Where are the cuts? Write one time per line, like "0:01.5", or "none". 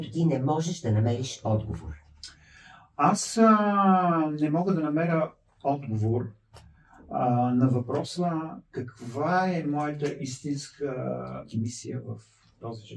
none